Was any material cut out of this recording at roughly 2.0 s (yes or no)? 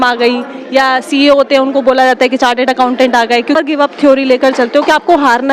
no